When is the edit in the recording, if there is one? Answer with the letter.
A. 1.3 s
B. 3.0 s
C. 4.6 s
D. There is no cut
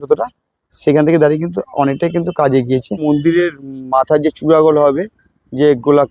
B